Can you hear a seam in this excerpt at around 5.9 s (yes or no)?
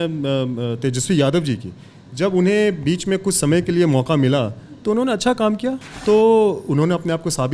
yes